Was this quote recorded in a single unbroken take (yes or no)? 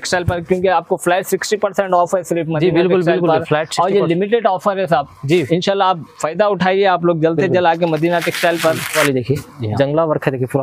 no